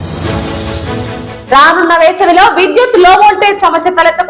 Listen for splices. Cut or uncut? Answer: cut